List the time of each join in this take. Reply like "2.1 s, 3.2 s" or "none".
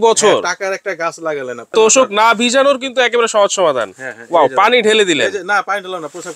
1.7 s